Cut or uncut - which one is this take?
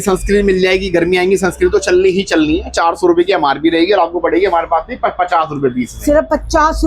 uncut